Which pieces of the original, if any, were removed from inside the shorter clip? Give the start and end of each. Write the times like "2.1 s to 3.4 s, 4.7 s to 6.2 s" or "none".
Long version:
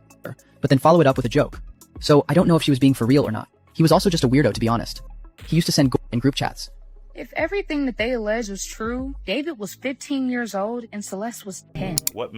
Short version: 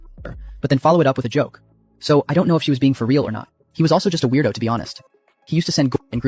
none